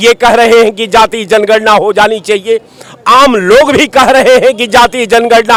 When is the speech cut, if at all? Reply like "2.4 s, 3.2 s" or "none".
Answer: none